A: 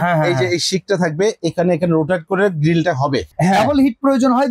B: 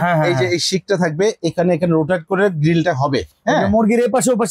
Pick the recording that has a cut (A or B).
A